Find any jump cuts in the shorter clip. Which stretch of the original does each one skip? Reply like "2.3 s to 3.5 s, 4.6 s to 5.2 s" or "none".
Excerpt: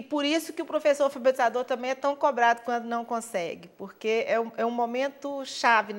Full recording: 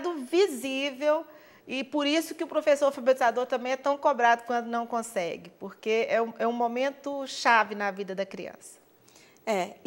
none